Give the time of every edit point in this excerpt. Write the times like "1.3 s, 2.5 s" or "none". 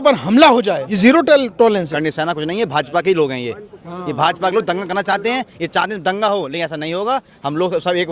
0.9 s, 2.0 s